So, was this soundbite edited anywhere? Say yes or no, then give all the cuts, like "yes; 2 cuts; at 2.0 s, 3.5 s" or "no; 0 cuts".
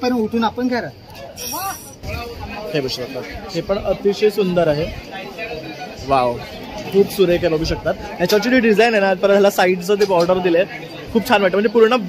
yes; 1 cut; at 2.0 s